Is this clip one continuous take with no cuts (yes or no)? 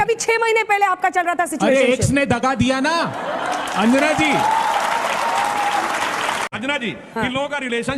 no